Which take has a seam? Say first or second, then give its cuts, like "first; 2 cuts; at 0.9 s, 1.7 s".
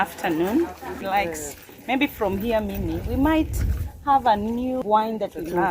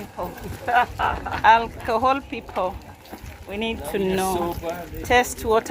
first; 2 cuts; at 0.9 s, 4.8 s